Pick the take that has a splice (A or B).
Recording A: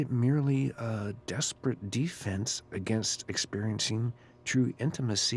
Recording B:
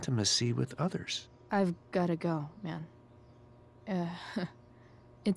B